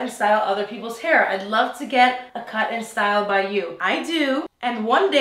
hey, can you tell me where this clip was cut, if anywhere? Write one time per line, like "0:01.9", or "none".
none